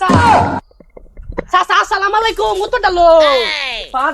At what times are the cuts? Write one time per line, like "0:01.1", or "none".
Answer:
none